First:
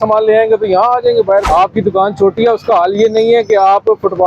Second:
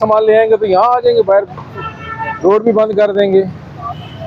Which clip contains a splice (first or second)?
first